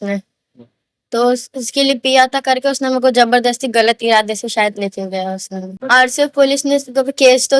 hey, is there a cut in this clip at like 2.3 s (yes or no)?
no